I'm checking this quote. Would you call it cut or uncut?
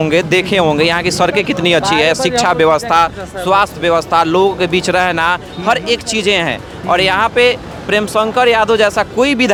uncut